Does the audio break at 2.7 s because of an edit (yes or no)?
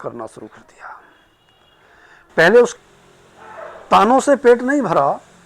yes